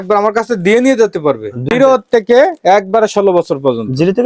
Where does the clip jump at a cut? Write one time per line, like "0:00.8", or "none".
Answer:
0:01.6